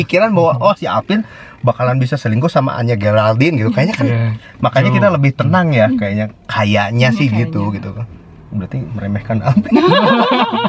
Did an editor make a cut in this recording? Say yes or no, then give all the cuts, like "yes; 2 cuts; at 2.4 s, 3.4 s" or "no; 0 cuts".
no; 0 cuts